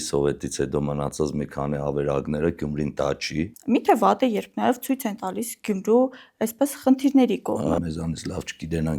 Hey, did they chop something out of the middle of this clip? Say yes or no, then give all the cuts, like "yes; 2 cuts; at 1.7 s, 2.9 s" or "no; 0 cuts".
yes; 2 cuts; at 3.5 s, 7.8 s